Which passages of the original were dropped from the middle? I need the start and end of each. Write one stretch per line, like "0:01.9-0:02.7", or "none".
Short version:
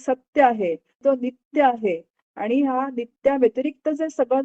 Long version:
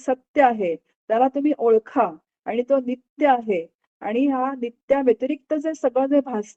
0:01.0-0:02.6